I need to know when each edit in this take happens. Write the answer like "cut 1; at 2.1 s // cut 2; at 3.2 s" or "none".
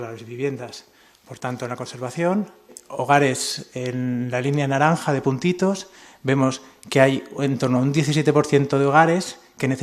none